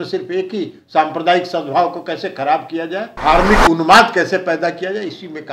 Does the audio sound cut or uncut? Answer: cut